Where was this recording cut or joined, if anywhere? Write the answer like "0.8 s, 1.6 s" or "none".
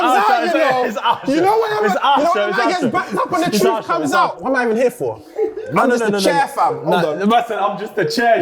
4.4 s